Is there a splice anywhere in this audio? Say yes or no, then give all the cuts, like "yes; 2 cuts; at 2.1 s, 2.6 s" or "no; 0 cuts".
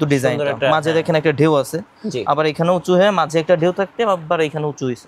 no; 0 cuts